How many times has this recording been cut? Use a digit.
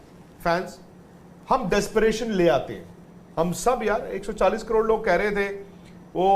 1